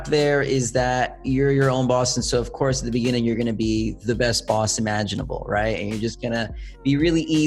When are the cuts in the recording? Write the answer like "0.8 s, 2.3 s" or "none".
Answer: none

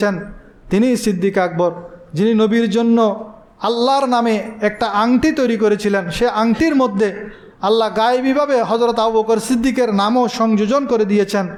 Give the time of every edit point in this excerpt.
none

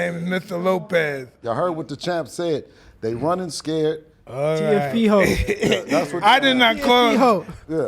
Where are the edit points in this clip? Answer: 1.4 s, 4.2 s

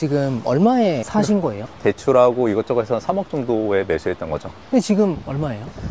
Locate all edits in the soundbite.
1.0 s, 4.5 s

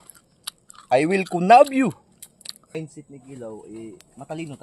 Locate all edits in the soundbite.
2.8 s

